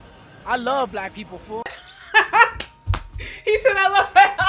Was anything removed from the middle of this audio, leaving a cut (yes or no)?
yes